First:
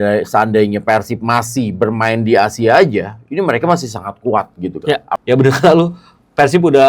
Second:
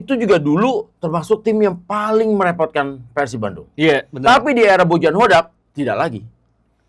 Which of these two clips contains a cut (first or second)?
first